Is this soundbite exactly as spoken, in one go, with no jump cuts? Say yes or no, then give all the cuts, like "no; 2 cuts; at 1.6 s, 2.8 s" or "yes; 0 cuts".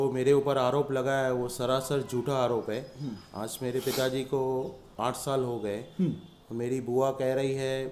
yes; 0 cuts